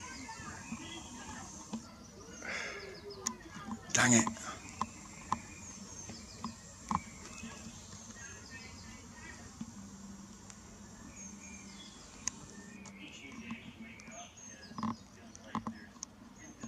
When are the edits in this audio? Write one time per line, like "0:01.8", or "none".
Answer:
none